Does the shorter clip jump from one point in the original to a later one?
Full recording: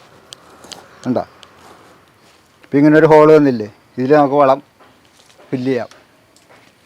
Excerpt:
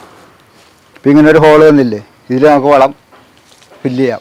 no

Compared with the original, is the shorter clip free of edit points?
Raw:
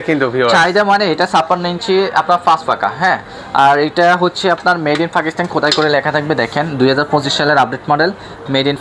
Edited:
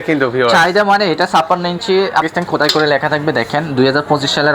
no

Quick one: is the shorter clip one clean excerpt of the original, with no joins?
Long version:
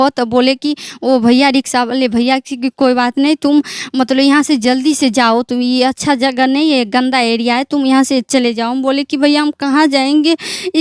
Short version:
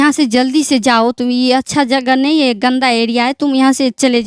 yes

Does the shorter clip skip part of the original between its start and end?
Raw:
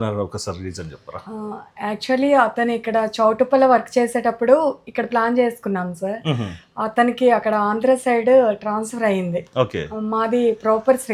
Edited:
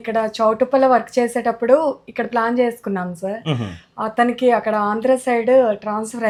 no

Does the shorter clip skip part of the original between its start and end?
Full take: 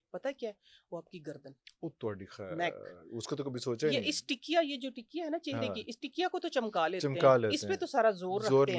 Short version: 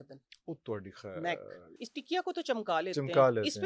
yes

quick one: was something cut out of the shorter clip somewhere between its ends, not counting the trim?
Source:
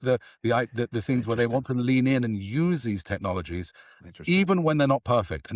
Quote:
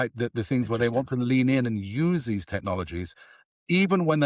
no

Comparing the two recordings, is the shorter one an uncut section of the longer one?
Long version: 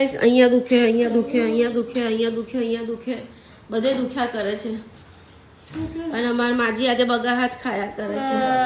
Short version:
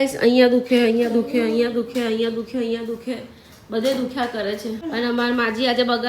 no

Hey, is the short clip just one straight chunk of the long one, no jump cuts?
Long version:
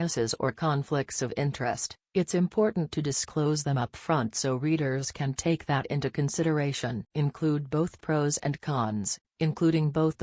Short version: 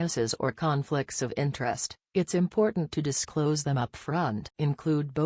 no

